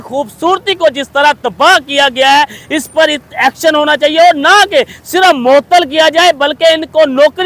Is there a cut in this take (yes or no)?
no